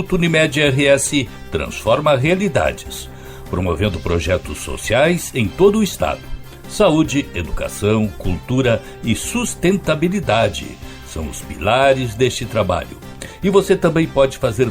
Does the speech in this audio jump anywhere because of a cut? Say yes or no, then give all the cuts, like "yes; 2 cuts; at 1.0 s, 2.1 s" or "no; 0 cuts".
no; 0 cuts